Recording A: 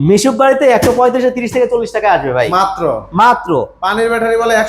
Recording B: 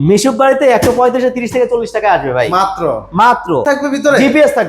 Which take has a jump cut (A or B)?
B